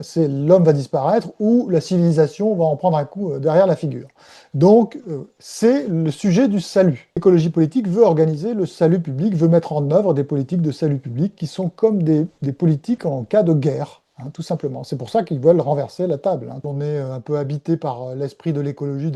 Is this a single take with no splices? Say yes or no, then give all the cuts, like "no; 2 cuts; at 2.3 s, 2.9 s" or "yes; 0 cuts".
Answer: no; 2 cuts; at 7.2 s, 16.6 s